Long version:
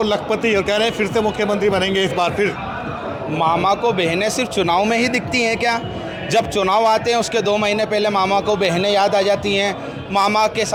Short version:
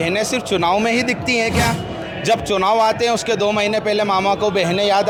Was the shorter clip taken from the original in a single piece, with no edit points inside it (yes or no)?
yes